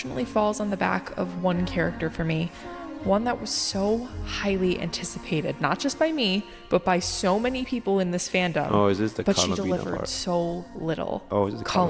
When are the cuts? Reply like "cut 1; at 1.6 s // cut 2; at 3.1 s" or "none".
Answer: none